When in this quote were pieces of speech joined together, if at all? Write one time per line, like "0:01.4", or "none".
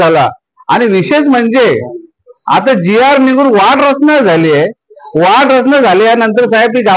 none